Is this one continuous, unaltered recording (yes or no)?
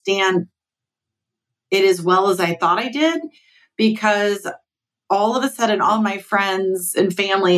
yes